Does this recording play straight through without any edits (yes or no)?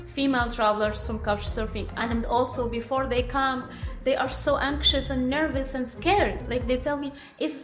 no